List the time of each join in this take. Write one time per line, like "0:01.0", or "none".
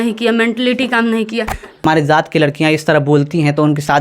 0:01.8